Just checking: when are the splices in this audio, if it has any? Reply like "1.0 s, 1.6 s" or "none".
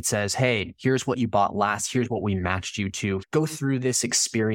none